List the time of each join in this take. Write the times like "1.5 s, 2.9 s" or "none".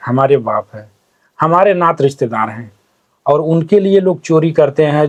none